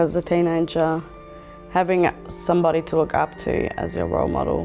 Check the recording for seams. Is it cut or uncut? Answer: uncut